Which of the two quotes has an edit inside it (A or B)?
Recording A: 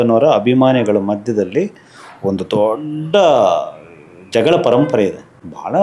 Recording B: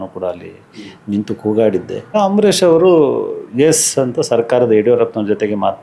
B